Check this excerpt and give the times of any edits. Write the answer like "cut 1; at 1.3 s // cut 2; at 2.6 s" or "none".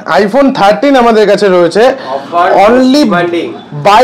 none